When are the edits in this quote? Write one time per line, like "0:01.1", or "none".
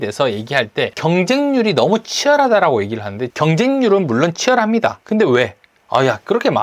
0:00.9
0:03.2